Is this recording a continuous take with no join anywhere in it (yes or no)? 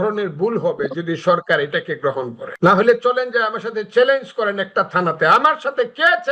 no